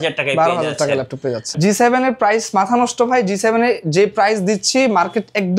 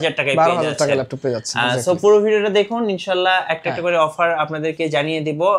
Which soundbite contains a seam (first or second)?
first